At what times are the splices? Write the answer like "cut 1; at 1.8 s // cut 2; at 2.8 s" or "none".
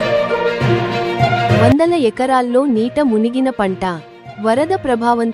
cut 1; at 1.5 s